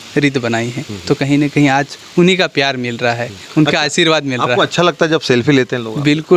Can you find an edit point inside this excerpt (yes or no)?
no